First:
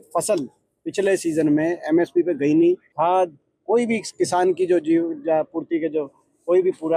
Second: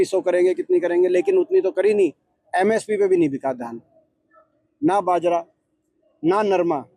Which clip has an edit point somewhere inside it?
first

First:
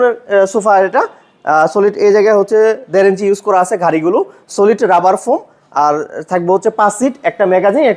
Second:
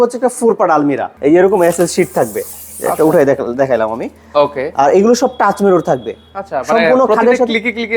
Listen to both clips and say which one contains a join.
second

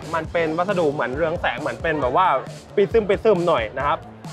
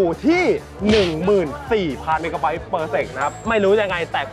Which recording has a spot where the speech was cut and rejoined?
second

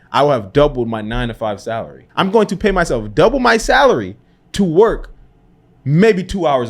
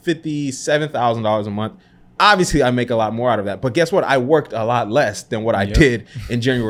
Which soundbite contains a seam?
first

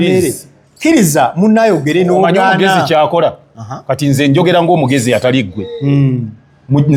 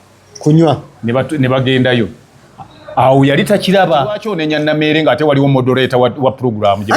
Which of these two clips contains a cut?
second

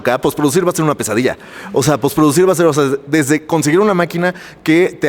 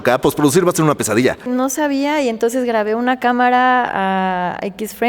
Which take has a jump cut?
second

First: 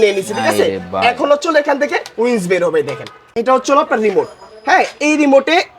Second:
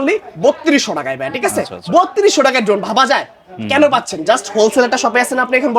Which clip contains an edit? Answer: first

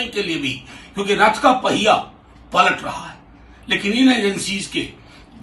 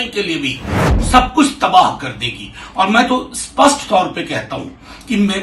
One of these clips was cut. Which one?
second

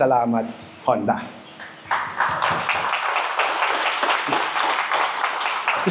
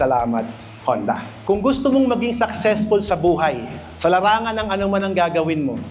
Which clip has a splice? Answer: second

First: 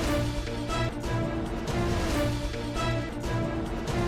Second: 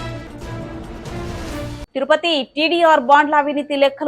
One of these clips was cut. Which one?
second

